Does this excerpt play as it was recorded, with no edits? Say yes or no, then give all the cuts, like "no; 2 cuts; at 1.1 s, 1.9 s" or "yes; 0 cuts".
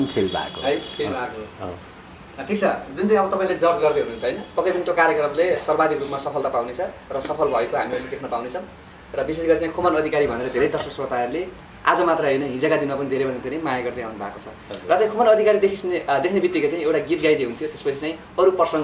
yes; 0 cuts